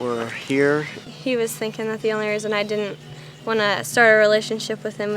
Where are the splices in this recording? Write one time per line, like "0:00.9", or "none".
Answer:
0:01.1